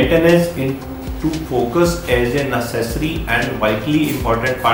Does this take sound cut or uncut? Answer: uncut